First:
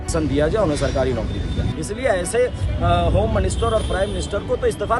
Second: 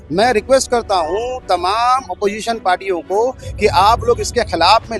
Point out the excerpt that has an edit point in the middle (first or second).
first